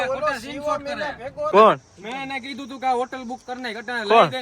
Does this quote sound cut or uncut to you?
cut